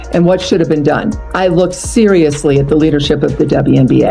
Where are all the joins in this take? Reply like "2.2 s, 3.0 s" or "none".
1.2 s